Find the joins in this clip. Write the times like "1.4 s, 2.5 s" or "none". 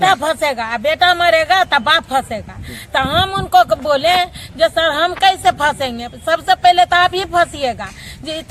none

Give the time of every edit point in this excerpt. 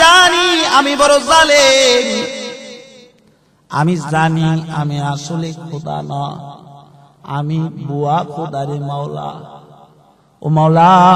none

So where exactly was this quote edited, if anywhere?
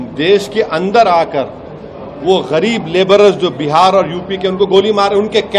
none

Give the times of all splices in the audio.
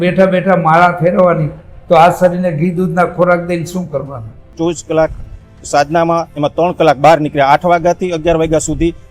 4.4 s

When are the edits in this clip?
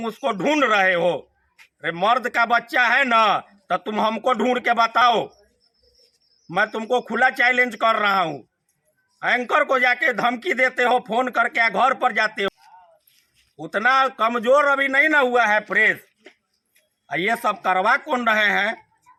none

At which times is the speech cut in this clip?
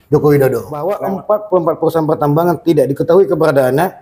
0.9 s

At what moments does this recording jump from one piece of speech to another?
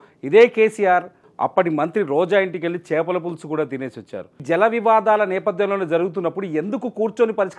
1.2 s, 4.3 s

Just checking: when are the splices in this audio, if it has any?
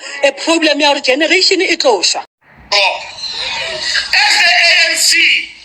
2.4 s

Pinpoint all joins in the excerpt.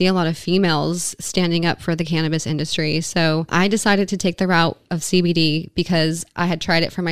3.5 s

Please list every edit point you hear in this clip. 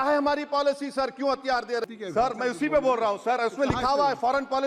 1.8 s

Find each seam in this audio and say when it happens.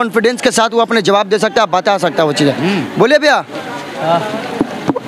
none

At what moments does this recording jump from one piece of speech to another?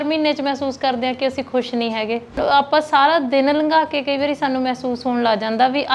2.4 s

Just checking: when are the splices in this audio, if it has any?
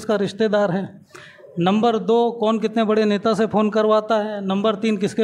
none

